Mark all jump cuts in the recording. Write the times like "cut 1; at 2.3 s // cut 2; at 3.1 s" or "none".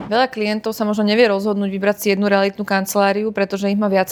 none